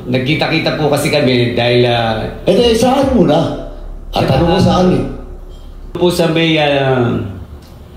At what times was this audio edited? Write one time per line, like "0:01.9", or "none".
0:06.0